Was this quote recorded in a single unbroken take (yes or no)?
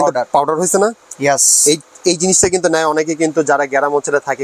yes